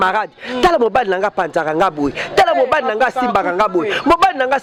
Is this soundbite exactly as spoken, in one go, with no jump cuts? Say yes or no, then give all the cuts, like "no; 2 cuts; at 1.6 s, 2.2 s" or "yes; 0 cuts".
yes; 0 cuts